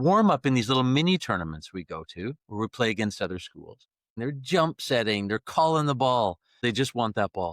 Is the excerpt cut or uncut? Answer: cut